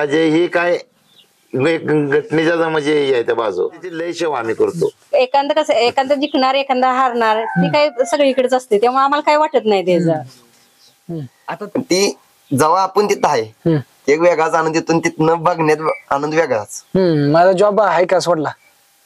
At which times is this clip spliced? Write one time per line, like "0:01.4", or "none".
0:04.1
0:11.3